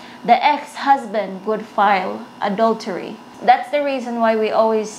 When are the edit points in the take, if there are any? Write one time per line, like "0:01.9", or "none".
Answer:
0:03.2